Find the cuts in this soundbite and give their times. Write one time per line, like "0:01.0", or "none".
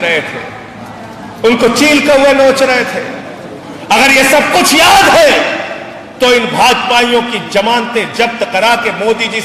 none